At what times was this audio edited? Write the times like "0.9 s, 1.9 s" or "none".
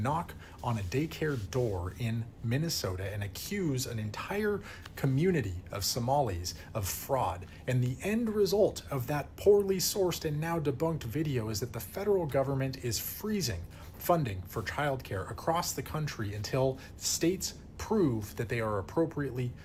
none